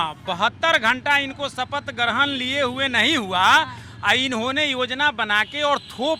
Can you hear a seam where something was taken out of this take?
no; 0 cuts

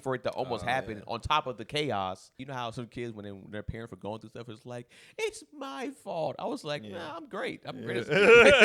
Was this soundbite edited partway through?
yes; 1 cut; at 2.4 s

